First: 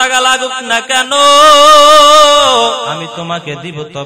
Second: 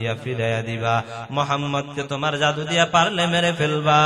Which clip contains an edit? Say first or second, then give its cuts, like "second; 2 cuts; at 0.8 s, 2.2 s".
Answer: first; 1 cut; at 3.0 s